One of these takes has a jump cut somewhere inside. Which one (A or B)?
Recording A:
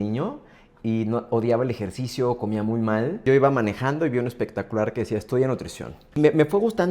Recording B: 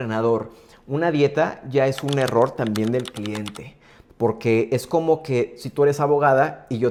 A